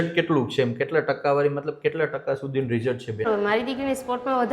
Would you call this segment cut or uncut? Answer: cut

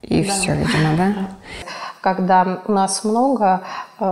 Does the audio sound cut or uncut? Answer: cut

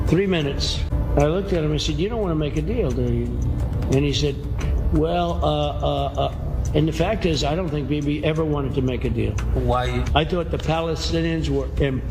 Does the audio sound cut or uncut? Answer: cut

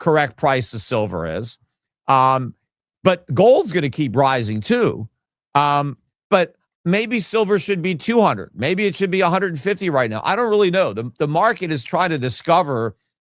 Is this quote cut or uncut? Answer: uncut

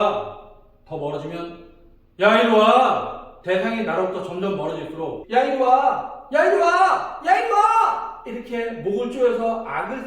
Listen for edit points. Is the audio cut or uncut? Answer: cut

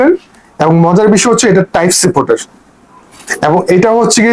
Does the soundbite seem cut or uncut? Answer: uncut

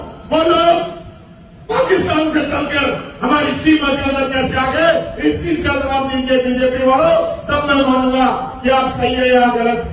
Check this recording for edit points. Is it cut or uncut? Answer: uncut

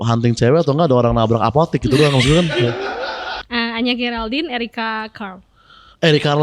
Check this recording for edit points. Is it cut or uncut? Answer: cut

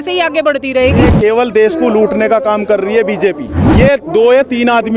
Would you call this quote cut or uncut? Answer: cut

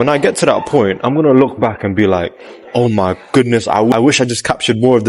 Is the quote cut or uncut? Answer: cut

